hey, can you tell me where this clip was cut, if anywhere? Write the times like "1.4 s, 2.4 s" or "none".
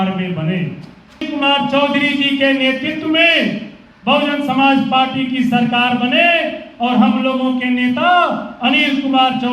1.3 s